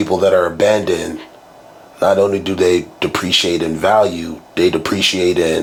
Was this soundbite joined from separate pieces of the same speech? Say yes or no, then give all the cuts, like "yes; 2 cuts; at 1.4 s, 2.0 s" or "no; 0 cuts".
no; 0 cuts